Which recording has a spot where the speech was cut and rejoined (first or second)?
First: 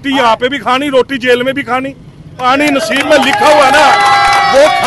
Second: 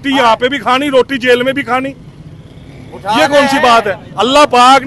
first